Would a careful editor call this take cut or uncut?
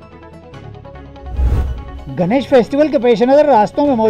cut